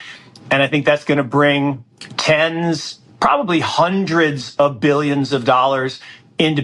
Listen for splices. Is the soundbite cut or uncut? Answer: uncut